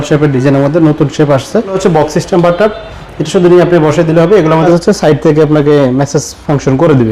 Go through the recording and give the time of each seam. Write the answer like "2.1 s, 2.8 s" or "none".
1.8 s, 4.6 s